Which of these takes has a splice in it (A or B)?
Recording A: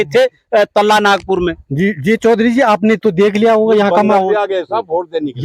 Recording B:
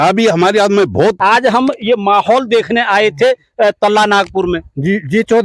B